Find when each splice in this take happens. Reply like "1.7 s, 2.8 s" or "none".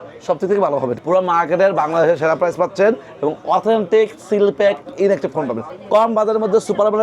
0.9 s, 5.8 s